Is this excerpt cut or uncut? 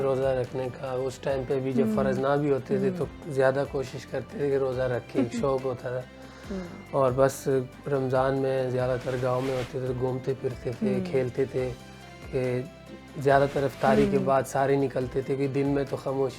uncut